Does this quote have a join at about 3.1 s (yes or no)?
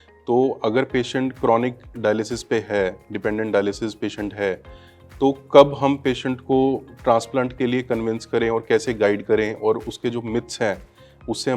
no